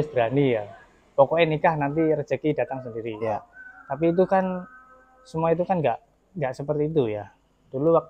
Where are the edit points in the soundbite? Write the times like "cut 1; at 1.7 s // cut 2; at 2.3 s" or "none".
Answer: none